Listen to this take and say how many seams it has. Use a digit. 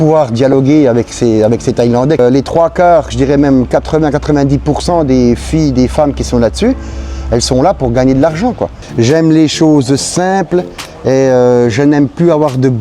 2